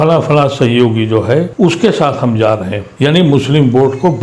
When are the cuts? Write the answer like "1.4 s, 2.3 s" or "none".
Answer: 1.5 s, 3.1 s